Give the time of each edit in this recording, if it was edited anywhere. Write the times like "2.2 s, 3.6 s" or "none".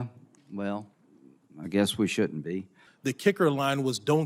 2.7 s